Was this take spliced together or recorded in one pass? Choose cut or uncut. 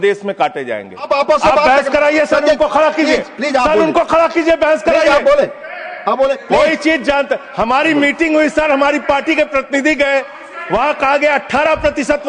cut